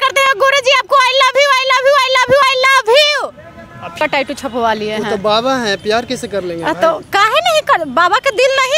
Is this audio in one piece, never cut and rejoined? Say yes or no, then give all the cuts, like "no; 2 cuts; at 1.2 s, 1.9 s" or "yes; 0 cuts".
no; 1 cut; at 4.0 s